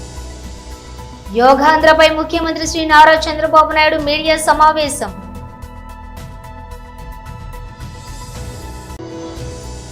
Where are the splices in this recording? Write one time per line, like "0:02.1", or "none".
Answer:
0:01.3
0:05.2
0:08.9